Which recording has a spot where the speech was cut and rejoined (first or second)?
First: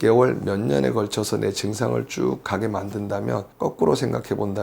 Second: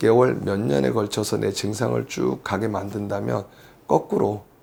first